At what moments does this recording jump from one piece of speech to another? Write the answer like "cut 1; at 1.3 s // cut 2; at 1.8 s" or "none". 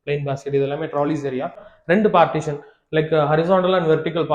cut 1; at 1.6 s